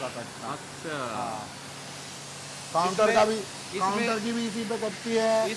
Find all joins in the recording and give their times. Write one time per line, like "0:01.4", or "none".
none